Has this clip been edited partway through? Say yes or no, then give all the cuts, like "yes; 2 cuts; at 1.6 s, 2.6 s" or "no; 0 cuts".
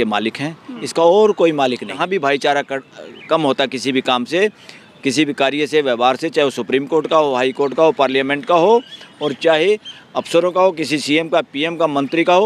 yes; 1 cut; at 2.0 s